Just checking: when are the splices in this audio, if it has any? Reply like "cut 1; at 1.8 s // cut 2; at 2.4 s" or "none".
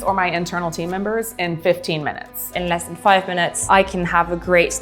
cut 1; at 2.6 s